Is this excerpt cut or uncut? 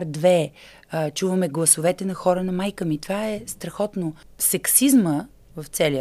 cut